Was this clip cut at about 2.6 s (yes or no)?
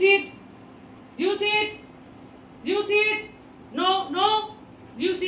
no